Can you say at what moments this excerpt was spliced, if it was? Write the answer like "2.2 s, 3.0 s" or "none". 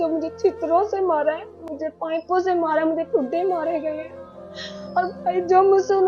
1.7 s